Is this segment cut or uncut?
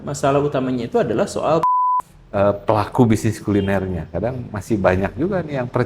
cut